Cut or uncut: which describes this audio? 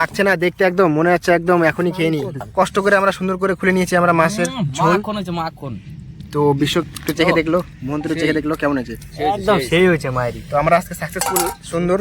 cut